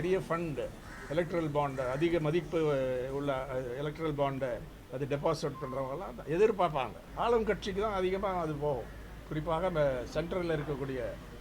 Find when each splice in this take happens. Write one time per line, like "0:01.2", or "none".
0:07.0